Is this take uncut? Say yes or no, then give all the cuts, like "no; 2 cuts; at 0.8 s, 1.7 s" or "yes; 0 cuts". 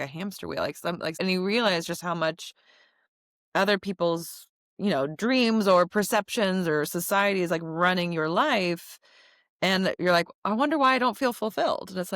no; 1 cut; at 1.2 s